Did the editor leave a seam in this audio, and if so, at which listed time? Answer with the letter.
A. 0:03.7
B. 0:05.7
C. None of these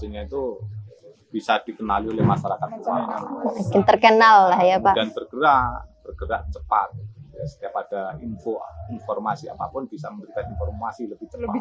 C